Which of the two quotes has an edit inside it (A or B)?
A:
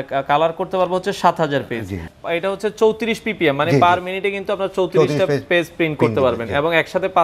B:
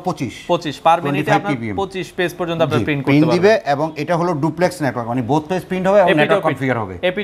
A